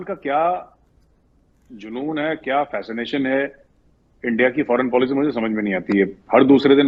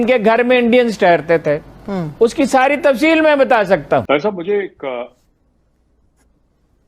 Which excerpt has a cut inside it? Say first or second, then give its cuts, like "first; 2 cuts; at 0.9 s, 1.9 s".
second; 1 cut; at 4.0 s